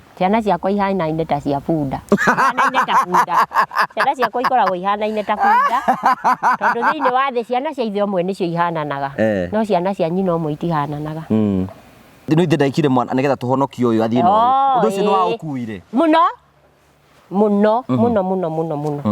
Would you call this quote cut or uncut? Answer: cut